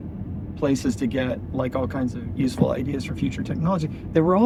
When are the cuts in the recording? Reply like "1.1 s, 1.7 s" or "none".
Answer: none